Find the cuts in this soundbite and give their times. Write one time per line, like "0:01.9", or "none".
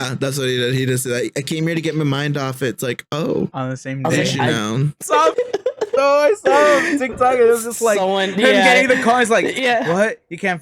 0:05.0

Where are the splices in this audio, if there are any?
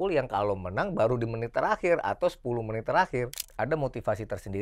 0:03.4

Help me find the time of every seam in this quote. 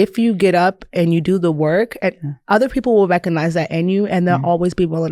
none

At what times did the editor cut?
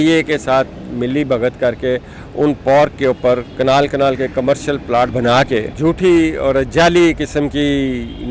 0:05.1
0:05.7

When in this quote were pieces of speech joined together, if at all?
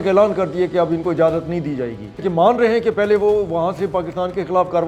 0:02.3

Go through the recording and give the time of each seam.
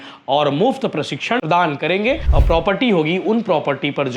0:01.4
0:02.3

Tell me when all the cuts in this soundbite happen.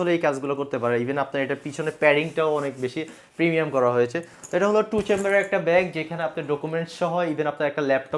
none

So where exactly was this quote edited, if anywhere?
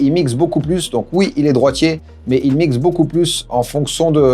none

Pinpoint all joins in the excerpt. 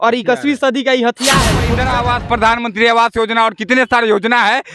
0:01.7

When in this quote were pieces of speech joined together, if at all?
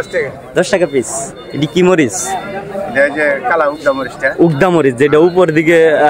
none

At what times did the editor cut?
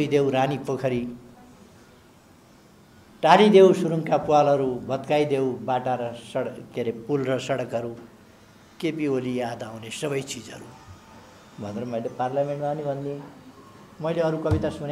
none

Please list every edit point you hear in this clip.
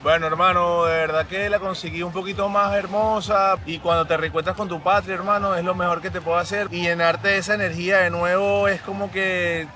0:03.6
0:06.7

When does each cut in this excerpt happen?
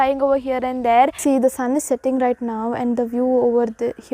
0:01.2

